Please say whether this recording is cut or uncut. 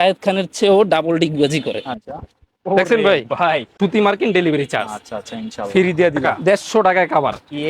cut